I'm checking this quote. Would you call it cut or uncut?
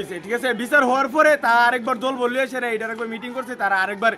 uncut